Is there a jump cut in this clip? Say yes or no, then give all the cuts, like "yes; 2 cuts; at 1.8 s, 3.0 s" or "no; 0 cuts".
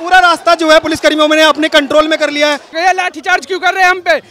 yes; 1 cut; at 2.8 s